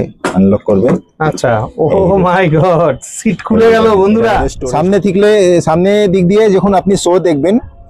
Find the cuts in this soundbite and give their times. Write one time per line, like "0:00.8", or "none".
0:04.5